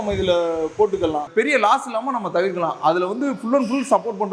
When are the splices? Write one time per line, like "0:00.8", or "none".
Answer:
0:01.3